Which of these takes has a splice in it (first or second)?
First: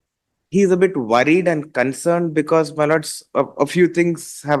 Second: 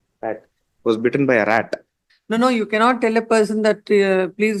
second